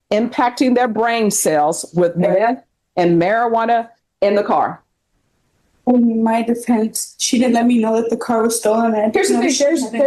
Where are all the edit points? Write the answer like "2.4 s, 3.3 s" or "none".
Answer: none